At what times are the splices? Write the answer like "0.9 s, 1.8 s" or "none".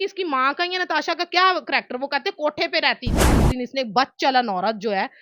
3.4 s